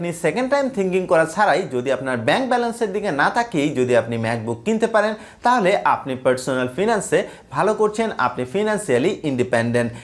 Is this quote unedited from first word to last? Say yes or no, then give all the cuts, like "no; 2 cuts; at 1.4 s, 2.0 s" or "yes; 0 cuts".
yes; 0 cuts